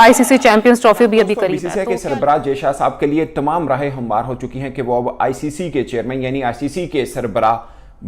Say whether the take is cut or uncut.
cut